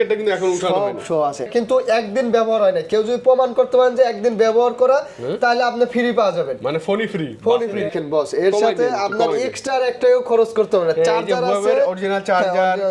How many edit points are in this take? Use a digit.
2